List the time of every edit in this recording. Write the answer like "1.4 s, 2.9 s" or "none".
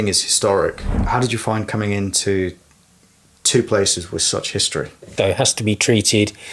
0.9 s, 5.1 s